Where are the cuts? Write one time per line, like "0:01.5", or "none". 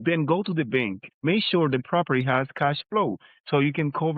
0:01.0